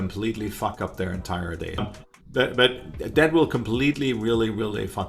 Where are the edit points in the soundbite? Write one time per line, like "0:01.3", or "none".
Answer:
0:01.8